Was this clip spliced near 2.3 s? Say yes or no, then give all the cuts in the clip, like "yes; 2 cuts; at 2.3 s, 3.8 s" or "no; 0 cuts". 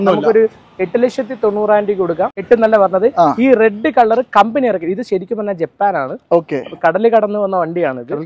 yes; 1 cut; at 2.3 s